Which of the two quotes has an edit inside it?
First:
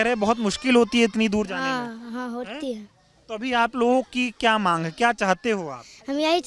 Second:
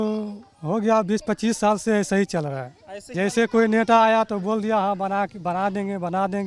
second; 1 cut; at 3.1 s

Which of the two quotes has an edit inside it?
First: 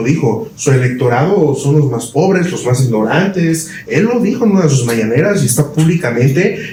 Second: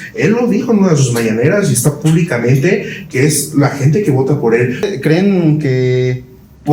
second; 1 cut; at 4.9 s

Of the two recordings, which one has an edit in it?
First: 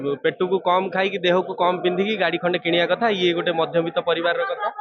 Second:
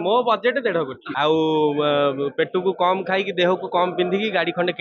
second; 1 cut; at 1.0 s

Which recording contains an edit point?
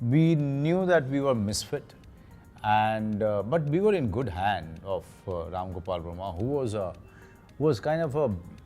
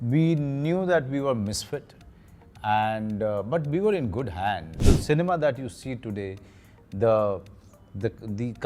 second; 1 cut; at 4.7 s

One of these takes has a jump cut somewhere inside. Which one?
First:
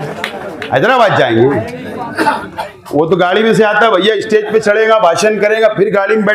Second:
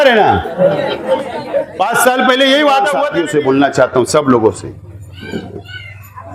second; 1 cut; at 3.1 s

